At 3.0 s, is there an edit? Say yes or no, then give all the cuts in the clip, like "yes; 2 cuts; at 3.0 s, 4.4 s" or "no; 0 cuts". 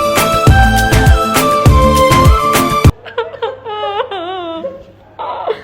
yes; 1 cut; at 3.0 s